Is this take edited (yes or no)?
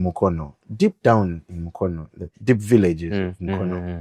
no